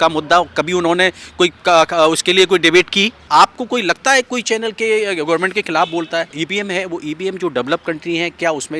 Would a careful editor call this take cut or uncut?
cut